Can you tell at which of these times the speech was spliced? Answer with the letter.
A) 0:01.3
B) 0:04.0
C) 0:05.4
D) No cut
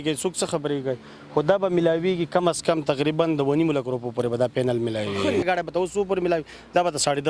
C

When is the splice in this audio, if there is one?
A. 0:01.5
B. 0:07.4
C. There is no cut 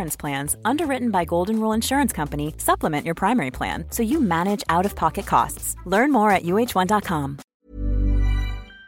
B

